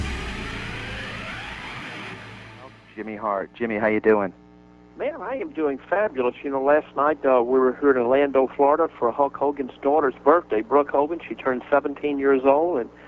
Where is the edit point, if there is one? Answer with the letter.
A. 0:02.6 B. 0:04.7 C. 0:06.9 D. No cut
A